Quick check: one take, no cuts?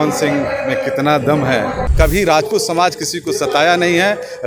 no; 1 cut; at 1.8 s

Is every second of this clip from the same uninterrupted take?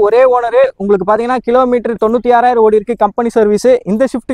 yes; 0 cuts

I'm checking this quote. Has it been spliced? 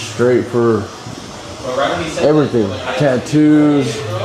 no; 0 cuts

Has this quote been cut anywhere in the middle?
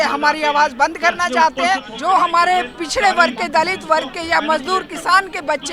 yes; 1 cut; at 1.9 s

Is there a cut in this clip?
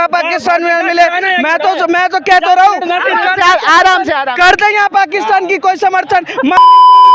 no; 0 cuts

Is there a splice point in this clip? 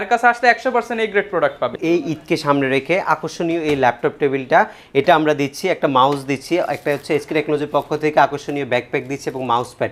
yes; 1 cut; at 1.7 s

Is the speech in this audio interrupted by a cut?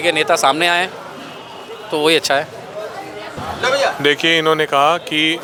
no; 0 cuts

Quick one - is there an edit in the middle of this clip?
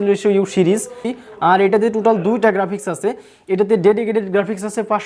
yes; 1 cut; at 1.1 s

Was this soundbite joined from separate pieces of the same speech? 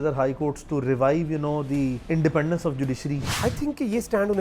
yes; 2 cuts; at 2.0 s, 3.3 s

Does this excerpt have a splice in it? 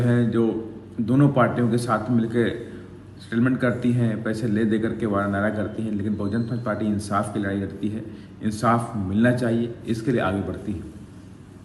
no; 0 cuts

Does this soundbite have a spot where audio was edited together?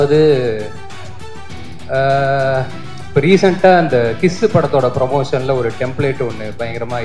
no; 0 cuts

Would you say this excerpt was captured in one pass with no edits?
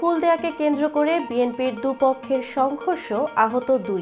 yes; 0 cuts

